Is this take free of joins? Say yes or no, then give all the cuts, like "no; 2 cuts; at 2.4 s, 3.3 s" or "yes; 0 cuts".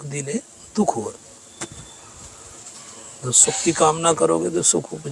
yes; 0 cuts